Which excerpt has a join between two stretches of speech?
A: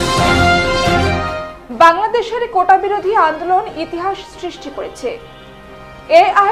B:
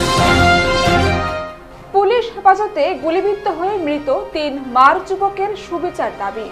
A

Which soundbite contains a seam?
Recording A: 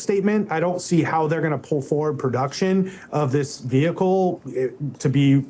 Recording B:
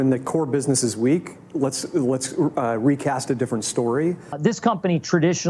B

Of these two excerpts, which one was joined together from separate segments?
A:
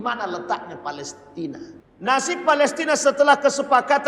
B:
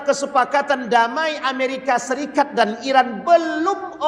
A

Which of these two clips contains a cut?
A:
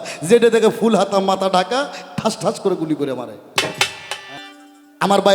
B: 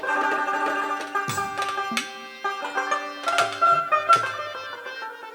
A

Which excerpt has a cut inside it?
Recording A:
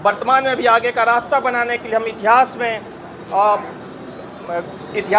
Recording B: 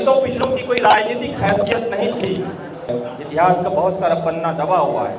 B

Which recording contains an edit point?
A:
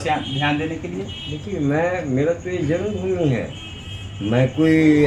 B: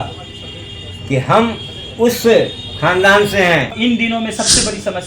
B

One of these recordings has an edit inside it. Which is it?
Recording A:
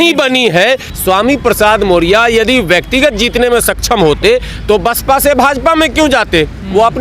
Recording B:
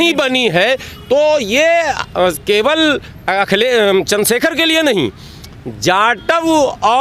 A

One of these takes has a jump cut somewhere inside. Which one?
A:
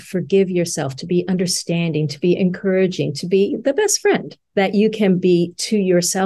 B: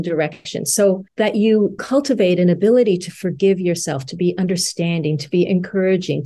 B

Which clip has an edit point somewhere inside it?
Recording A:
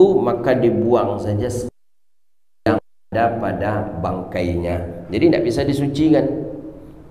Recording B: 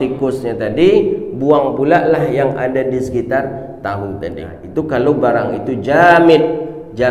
B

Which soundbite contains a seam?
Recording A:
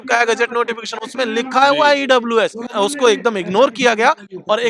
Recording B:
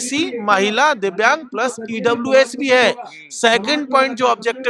A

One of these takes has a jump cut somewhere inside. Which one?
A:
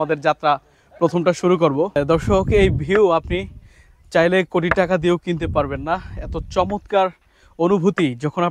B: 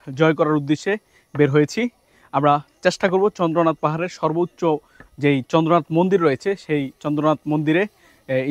A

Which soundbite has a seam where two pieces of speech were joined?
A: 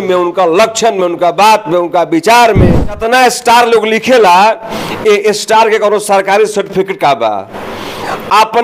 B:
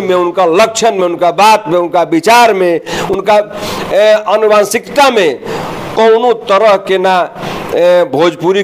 A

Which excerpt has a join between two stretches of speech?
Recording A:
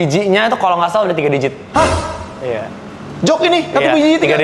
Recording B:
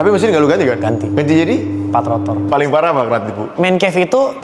B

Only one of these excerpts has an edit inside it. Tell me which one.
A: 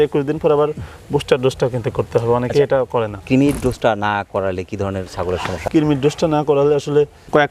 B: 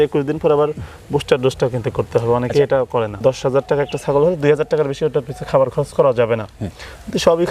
B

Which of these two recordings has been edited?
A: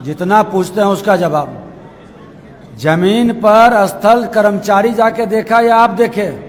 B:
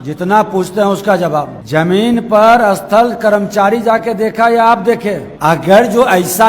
B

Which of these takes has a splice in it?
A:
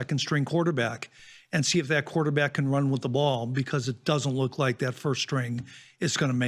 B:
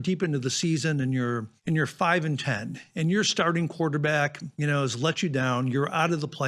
B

